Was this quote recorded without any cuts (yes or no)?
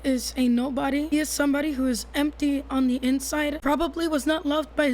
no